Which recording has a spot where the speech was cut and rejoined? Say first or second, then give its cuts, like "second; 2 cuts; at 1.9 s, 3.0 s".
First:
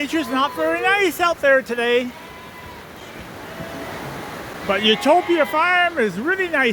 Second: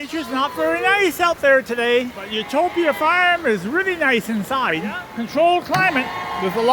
second; 2 cuts; at 2.4 s, 5.1 s